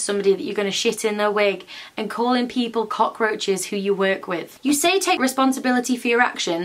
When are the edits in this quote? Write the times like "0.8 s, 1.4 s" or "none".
4.5 s